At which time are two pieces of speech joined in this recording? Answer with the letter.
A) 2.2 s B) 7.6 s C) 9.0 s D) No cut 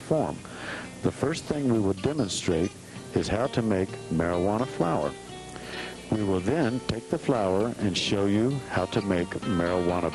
D